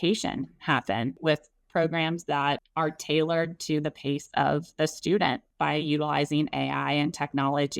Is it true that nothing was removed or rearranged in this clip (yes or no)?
no